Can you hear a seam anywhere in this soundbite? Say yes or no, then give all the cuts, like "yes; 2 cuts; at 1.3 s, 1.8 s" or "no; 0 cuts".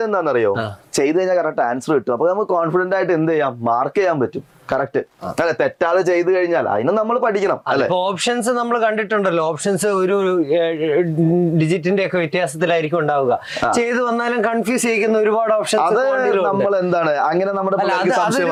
no; 0 cuts